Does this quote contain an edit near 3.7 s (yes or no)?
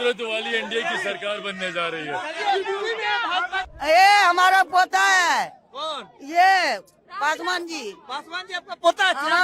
yes